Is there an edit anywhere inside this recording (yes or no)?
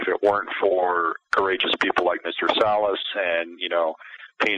yes